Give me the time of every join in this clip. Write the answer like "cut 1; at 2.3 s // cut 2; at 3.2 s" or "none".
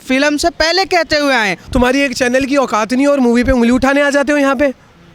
cut 1; at 1.6 s